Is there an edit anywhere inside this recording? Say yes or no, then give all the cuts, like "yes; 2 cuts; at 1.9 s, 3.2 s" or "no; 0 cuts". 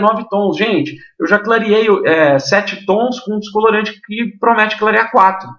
no; 0 cuts